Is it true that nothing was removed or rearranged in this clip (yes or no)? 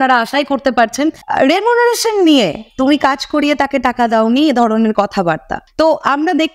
no